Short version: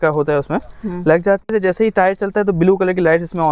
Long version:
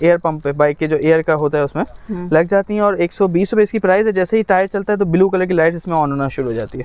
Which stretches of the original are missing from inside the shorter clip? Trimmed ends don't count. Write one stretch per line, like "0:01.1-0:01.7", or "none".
0:02.7-0:04.0